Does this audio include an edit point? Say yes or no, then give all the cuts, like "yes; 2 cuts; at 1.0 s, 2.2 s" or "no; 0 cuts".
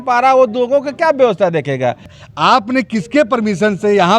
yes; 1 cut; at 2.2 s